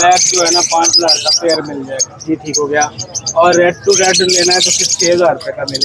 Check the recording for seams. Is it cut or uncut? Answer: uncut